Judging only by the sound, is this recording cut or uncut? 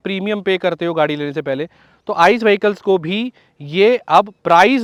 uncut